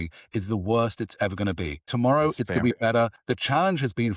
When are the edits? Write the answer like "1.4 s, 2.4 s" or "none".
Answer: 1.9 s, 3.2 s